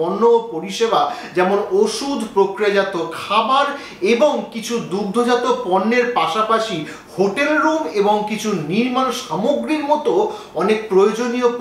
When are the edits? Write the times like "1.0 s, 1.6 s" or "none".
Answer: none